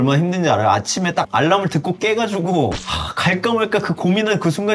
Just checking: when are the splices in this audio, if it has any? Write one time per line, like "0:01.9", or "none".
none